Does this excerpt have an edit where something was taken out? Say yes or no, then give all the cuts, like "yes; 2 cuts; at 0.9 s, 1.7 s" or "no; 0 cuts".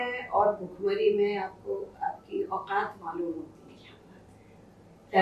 no; 0 cuts